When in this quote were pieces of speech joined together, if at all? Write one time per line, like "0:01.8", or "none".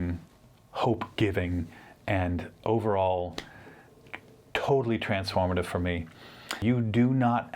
0:06.6